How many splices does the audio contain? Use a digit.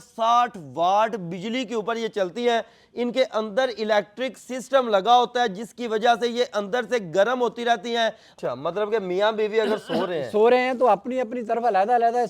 1